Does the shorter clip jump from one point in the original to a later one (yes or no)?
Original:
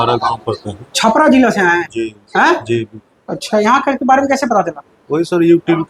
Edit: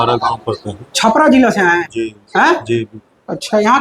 no